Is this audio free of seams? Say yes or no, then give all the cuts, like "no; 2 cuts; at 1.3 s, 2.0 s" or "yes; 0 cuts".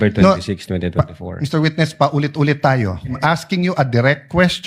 no; 1 cut; at 3.1 s